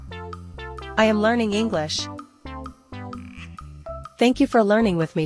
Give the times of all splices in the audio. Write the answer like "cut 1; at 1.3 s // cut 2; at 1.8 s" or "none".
cut 1; at 0.9 s // cut 2; at 2.6 s // cut 3; at 4.2 s